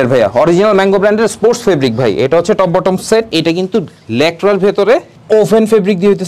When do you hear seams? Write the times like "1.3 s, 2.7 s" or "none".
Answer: 3.3 s